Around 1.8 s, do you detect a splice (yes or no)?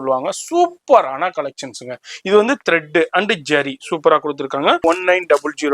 no